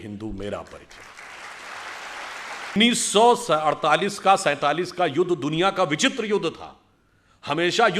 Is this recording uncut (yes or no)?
no